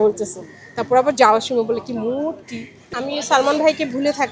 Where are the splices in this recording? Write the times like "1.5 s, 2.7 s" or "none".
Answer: 3.0 s